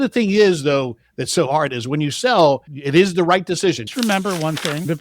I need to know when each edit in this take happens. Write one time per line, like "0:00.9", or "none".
0:02.7
0:03.9